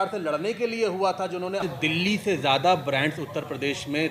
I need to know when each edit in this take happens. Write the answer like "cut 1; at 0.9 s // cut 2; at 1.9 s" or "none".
cut 1; at 1.6 s